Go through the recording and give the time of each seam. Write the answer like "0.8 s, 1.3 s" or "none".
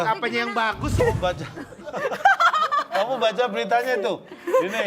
0.9 s